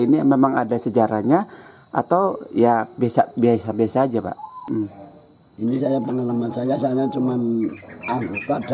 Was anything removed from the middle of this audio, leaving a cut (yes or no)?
yes